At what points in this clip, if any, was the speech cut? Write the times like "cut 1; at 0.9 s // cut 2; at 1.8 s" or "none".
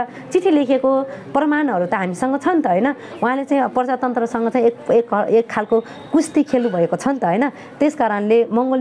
none